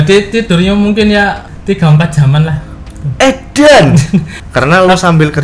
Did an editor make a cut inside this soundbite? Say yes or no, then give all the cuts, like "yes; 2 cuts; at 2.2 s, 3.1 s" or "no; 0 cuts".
yes; 2 cuts; at 1.5 s, 4.4 s